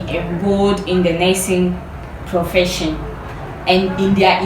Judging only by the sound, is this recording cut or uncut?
cut